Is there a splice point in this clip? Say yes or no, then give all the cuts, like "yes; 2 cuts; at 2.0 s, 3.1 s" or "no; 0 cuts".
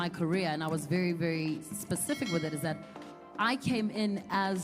no; 0 cuts